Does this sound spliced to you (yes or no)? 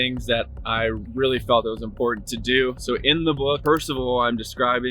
yes